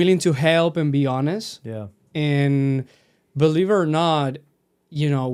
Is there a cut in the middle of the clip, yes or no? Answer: no